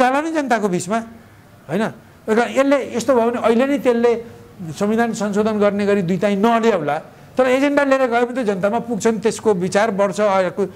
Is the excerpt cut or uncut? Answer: uncut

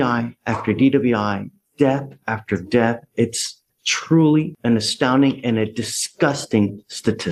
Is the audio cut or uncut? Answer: uncut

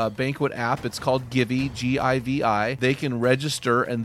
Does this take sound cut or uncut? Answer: cut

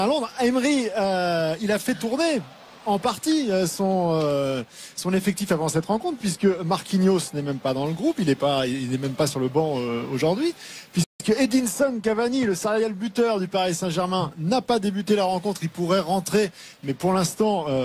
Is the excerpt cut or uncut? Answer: uncut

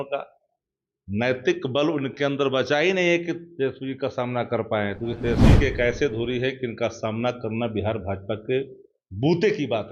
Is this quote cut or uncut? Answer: cut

